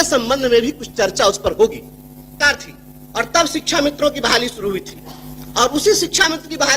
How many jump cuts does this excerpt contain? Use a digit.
1